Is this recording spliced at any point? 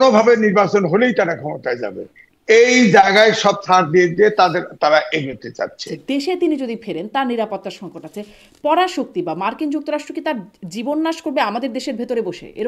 yes; 1 cut; at 5.9 s

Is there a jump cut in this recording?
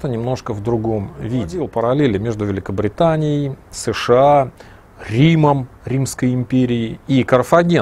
yes; 1 cut; at 1.6 s

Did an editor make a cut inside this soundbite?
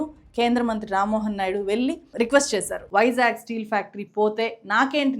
yes; 1 cut; at 2.9 s

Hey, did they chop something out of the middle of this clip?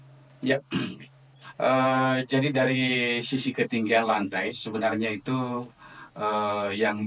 no; 0 cuts

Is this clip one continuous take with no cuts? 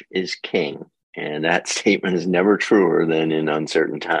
yes; 0 cuts

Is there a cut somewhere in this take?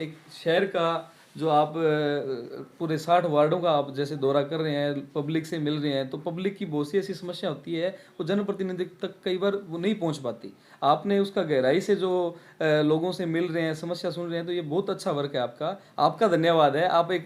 no; 0 cuts

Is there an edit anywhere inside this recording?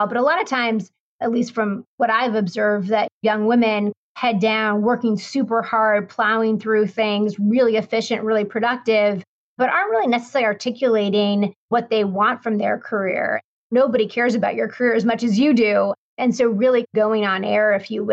no; 0 cuts

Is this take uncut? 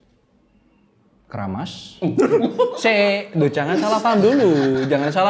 yes; 0 cuts

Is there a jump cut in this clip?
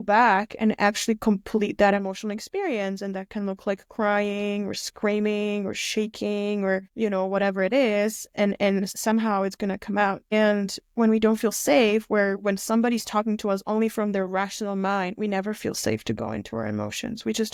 no; 0 cuts

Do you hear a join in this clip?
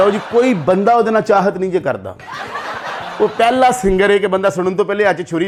no; 0 cuts

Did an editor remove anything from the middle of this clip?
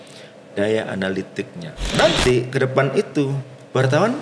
yes; 1 cut; at 1.9 s

